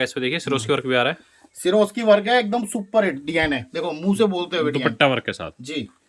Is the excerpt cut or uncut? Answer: uncut